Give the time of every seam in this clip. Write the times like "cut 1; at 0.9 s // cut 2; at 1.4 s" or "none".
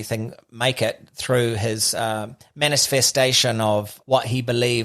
cut 1; at 3.9 s